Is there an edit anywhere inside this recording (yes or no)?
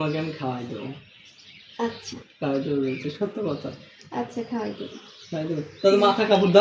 no